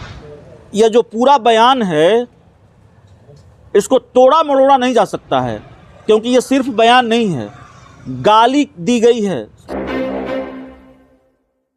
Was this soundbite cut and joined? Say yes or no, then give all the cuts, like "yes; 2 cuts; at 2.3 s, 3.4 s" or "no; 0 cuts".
yes; 1 cut; at 9.8 s